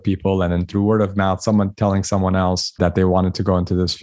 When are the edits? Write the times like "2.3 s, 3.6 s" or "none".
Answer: 2.7 s